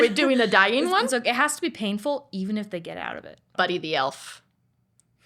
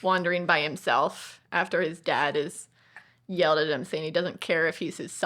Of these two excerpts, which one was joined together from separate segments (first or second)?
first